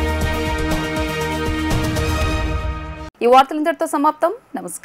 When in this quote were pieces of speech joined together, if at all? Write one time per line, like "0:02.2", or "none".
none